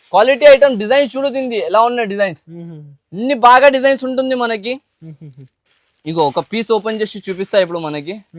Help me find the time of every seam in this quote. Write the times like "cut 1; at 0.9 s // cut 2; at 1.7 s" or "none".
none